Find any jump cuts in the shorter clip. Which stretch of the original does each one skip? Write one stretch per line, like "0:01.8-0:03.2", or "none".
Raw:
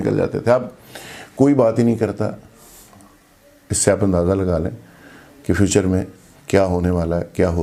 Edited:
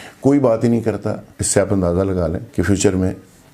0:02.5-0:03.6
0:04.7-0:05.3